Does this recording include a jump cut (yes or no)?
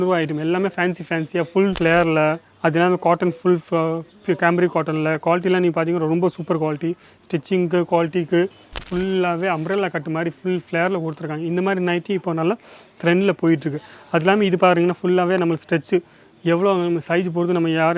yes